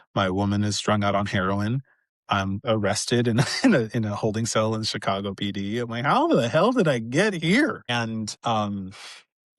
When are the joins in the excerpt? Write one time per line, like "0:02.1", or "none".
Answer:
0:02.6
0:07.9

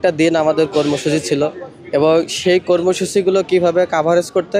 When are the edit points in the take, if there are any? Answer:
none

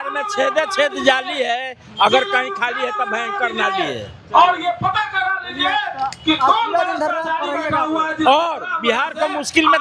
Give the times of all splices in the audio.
none

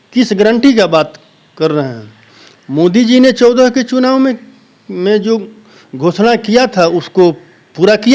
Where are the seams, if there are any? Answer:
none

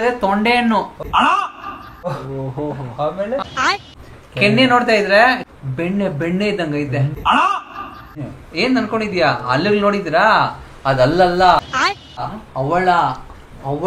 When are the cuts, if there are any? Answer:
0:00.9

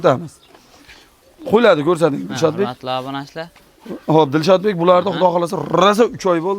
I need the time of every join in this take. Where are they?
none

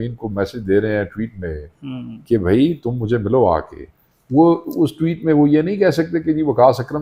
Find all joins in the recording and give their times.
none

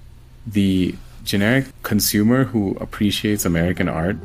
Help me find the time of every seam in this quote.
0:01.7

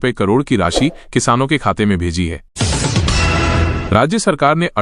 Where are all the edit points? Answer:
0:02.4
0:03.8

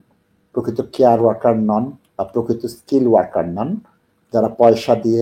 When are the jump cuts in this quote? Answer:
none

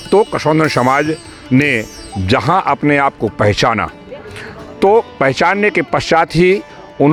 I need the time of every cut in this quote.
none

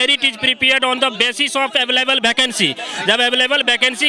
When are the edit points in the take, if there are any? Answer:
none

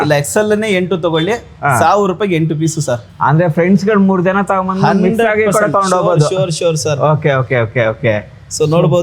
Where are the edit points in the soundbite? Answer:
none

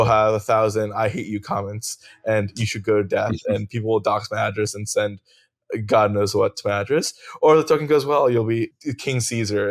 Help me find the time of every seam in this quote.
0:08.7

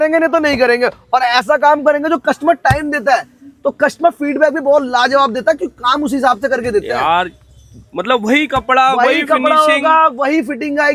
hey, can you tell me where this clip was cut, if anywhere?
none

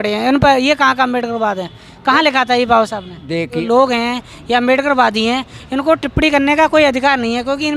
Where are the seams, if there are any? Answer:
0:03.6

